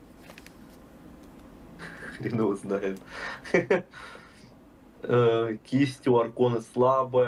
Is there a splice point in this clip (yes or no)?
no